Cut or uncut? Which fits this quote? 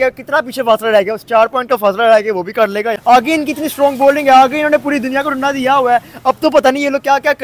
cut